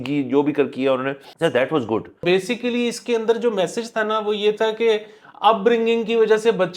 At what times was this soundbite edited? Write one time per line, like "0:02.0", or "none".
0:01.2
0:02.2